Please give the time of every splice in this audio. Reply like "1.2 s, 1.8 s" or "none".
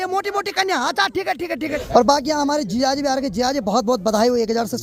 1.8 s